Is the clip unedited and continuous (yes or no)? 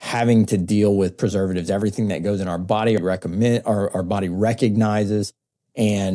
yes